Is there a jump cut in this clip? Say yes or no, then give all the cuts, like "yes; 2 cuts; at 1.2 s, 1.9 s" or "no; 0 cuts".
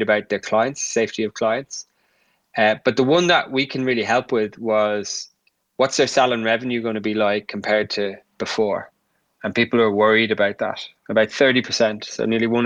no; 0 cuts